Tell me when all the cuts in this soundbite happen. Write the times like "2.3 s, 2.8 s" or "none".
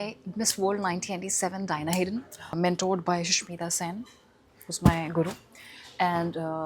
2.6 s